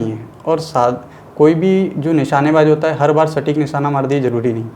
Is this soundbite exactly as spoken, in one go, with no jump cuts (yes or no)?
yes